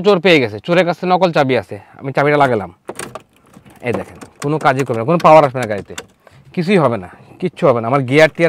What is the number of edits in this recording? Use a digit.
0